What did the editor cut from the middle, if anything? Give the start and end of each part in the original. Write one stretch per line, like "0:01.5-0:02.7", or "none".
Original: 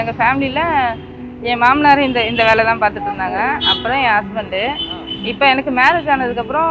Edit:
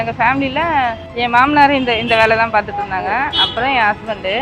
0:01.0-0:01.3